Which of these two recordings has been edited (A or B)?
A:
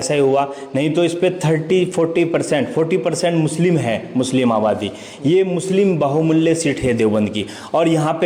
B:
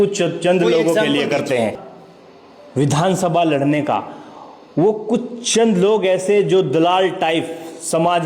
B